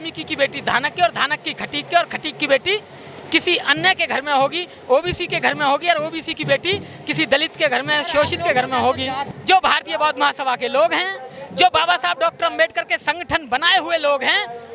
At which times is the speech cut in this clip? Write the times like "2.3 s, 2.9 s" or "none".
9.3 s